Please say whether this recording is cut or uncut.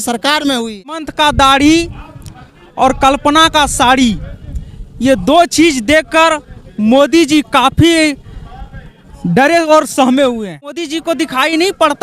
cut